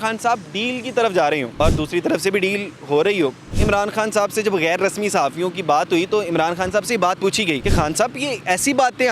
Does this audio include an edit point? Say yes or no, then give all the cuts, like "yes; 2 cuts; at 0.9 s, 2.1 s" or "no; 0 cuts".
yes; 3 cuts; at 1.5 s, 3.5 s, 7.6 s